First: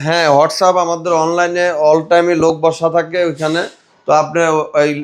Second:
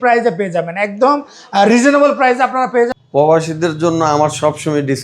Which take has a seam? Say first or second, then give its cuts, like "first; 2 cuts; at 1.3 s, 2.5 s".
second; 1 cut; at 2.9 s